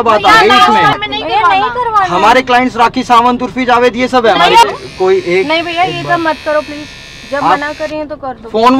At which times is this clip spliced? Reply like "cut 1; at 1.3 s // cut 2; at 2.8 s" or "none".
cut 1; at 1.0 s // cut 2; at 4.8 s